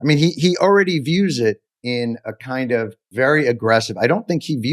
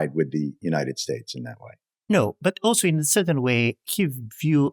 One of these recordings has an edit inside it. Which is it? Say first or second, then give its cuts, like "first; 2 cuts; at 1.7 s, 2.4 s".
first; 2 cuts; at 1.7 s, 3.0 s